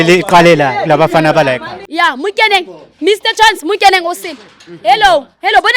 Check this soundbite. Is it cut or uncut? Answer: cut